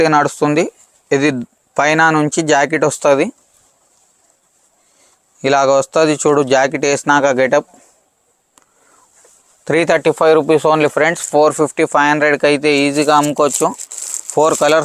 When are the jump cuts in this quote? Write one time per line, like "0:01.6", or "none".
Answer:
none